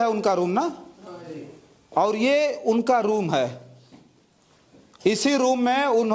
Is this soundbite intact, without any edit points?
yes; 0 cuts

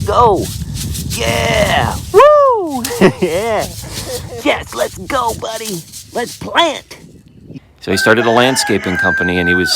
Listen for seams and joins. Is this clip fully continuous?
no; 1 cut; at 7.5 s

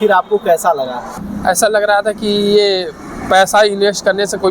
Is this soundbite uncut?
no; 1 cut; at 1.2 s

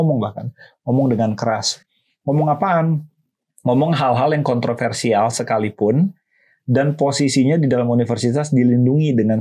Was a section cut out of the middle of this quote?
no; 0 cuts

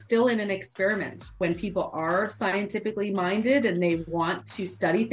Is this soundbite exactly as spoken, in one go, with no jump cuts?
no; 1 cut; at 1.3 s

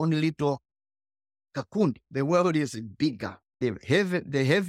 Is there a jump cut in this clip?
yes; 2 cuts; at 2.1 s, 3.5 s

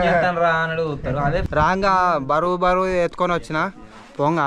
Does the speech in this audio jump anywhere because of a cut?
yes; 1 cut; at 1.5 s

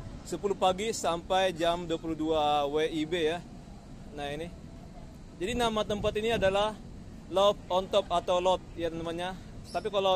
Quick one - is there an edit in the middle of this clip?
no; 0 cuts

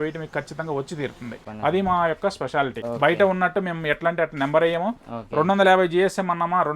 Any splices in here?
yes; 2 cuts; at 1.4 s, 2.8 s

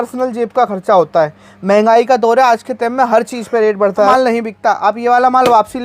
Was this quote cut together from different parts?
yes; 1 cut; at 4.1 s

